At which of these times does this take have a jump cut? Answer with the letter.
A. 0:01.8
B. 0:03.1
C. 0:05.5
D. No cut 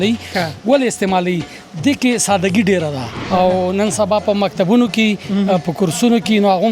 B